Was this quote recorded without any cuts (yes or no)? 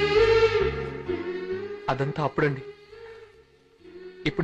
yes